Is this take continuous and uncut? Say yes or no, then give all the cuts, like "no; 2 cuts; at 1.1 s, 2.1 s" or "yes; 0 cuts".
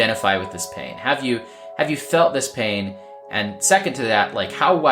yes; 0 cuts